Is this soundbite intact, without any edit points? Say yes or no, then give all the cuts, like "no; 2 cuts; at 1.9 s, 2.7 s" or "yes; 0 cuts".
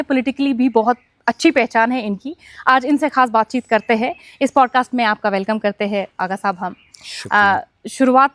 yes; 0 cuts